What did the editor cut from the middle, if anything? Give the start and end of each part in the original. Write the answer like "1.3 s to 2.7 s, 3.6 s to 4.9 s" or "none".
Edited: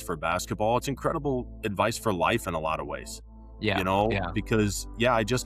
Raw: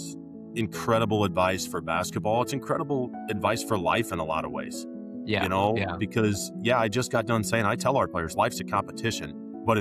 none